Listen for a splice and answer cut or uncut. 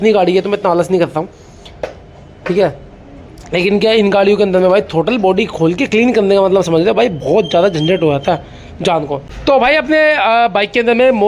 cut